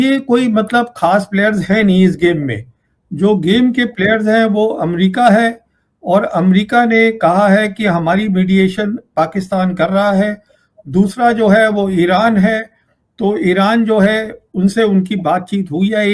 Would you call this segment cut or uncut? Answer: uncut